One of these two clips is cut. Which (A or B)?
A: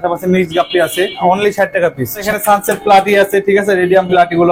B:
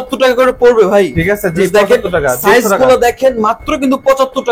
A